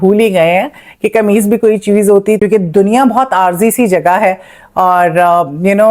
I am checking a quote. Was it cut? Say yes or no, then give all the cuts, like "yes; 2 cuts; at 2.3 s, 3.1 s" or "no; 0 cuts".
yes; 1 cut; at 2.4 s